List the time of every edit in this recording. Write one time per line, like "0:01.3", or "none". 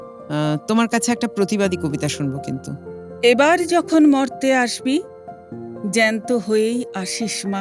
none